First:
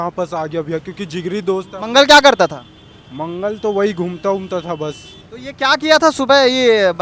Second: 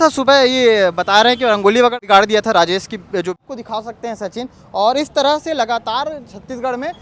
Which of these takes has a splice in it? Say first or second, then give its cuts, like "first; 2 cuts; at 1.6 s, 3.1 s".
second; 2 cuts; at 1.9 s, 3.4 s